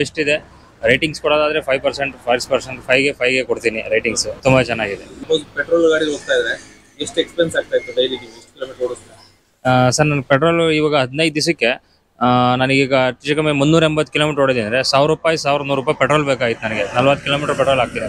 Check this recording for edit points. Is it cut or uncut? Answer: uncut